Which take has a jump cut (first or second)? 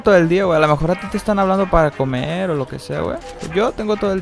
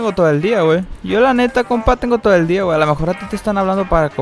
second